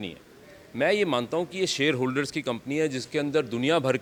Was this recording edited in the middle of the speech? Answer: no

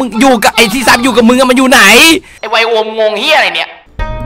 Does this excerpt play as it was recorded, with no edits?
no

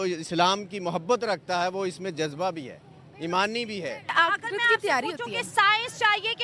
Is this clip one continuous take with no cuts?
no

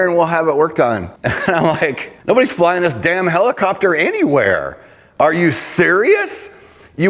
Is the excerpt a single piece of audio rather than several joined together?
no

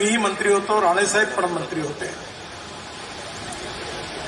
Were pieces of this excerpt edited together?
no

